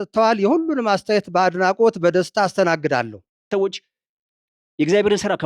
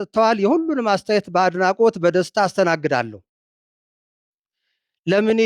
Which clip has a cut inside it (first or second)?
first